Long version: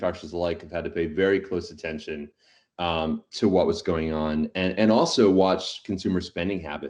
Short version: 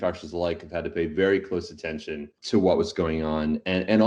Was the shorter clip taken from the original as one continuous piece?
no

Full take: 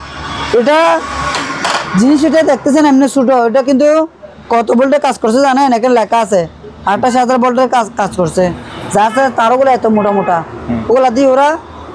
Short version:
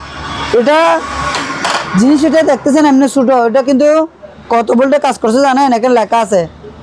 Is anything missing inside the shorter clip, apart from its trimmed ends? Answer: no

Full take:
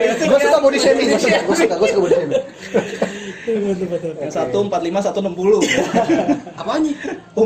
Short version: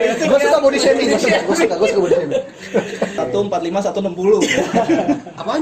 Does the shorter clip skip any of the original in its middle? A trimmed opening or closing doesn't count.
yes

